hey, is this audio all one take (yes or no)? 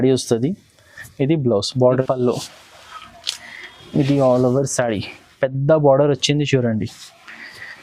no